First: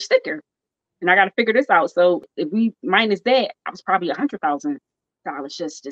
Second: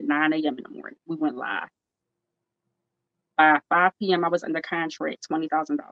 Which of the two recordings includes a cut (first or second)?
first